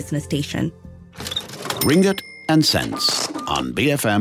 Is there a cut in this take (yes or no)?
yes